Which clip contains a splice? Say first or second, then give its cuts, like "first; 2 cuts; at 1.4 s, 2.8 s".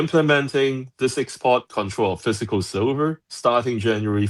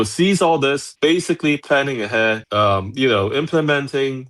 second; 2 cuts; at 0.9 s, 2.4 s